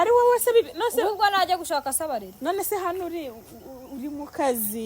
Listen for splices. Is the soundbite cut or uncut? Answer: cut